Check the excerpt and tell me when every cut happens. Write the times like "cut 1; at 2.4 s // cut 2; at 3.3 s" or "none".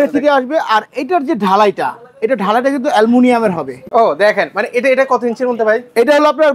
cut 1; at 3.7 s